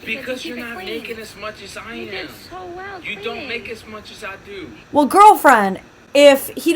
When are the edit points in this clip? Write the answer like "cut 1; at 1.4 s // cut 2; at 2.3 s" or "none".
cut 1; at 4.8 s